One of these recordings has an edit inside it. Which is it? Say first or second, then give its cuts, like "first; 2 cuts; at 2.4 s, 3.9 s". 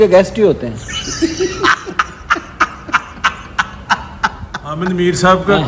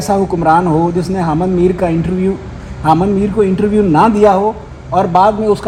first; 1 cut; at 4.8 s